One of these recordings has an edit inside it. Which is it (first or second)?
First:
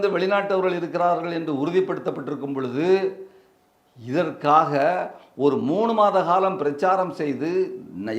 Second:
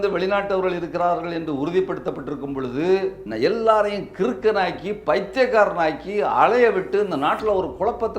second